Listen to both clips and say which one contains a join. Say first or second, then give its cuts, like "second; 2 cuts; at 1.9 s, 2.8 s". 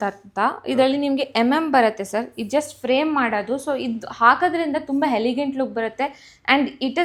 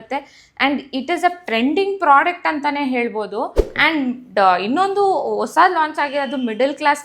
second; 1 cut; at 3.6 s